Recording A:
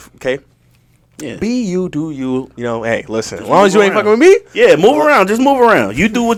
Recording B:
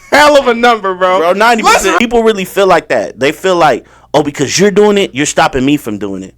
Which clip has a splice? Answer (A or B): B